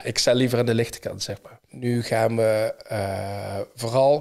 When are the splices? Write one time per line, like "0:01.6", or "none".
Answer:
0:01.7